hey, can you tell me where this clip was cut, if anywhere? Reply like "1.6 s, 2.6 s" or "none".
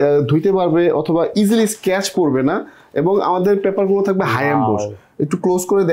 none